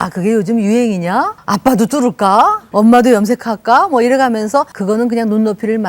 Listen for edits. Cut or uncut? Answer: cut